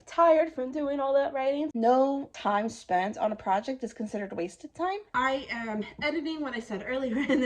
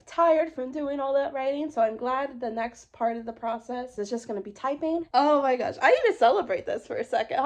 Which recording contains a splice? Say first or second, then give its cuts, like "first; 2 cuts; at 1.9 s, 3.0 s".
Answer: first; 2 cuts; at 1.7 s, 5.1 s